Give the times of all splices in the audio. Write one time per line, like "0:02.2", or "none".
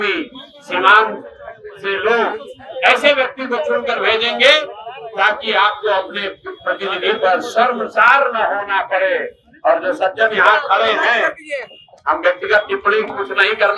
none

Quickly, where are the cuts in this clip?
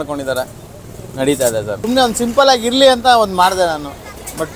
0:01.8

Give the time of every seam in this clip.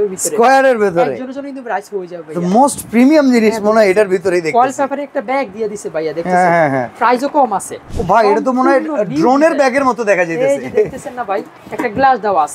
0:07.8
0:11.6

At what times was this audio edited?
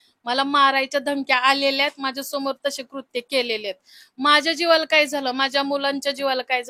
none

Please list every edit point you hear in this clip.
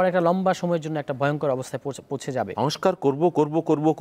0:02.5

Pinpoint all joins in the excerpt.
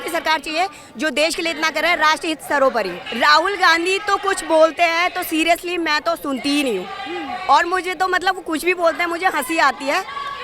0:03.0

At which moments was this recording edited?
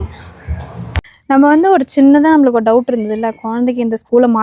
0:01.0

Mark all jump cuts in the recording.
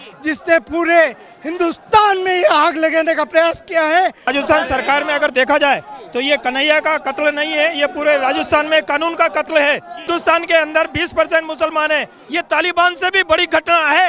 0:04.3
0:10.1

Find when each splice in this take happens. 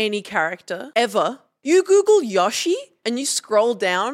0:00.8
0:01.5
0:02.9

